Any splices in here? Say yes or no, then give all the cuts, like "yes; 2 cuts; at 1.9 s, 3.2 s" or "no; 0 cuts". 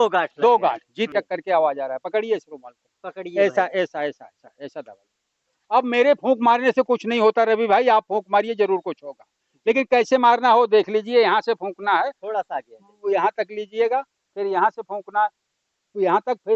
yes; 1 cut; at 1.1 s